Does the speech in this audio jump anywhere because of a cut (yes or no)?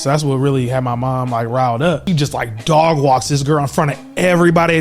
yes